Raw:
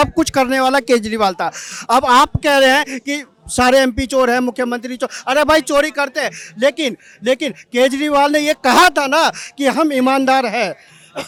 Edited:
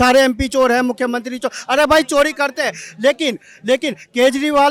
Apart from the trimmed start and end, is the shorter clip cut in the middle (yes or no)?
no